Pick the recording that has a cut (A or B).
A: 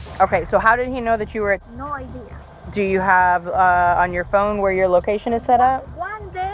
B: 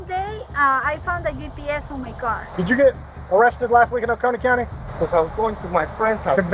B